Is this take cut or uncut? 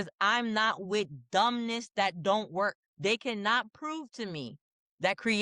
cut